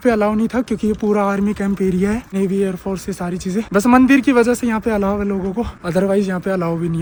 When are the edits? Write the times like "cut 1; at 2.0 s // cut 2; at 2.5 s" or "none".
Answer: none